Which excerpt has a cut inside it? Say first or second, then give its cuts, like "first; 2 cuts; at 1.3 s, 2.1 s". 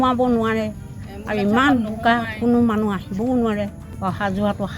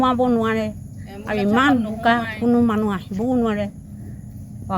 first; 1 cut; at 3.8 s